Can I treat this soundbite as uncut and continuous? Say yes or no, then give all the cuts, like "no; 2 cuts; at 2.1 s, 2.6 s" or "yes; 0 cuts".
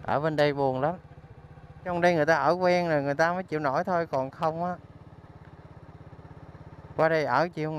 no; 1 cut; at 1.9 s